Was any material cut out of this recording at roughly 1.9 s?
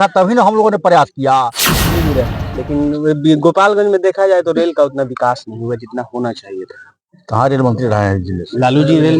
yes; 1 cut; at 1.9 s

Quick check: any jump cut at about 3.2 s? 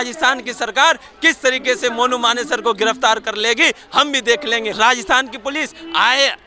no; 1 cut; at 4.7 s

